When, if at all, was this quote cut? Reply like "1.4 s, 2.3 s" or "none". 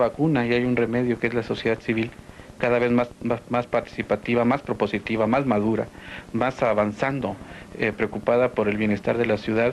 none

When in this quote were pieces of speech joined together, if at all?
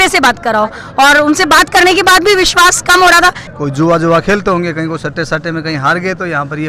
3.4 s

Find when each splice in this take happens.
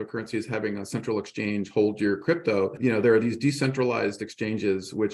2.8 s

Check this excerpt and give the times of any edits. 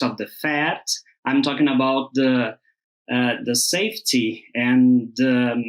none

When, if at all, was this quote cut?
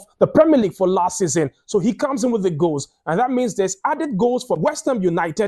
none

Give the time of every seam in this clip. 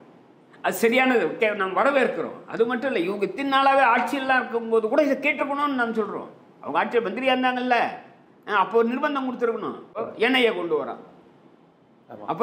10.0 s

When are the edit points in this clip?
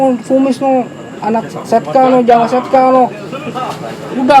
none

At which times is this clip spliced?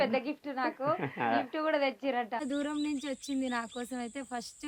2.5 s

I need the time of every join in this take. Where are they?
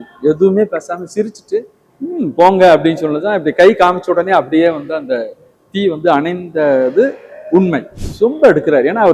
1.8 s, 8.0 s

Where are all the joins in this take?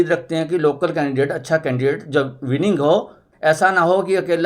3.6 s

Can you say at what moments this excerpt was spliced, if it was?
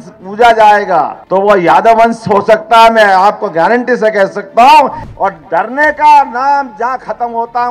1.2 s, 5.0 s

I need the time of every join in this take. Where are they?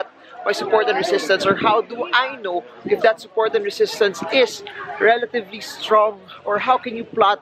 none

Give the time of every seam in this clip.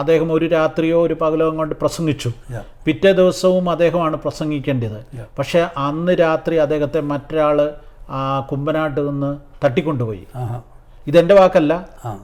none

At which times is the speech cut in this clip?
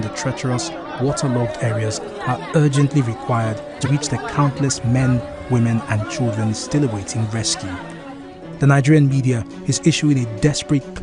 3.9 s

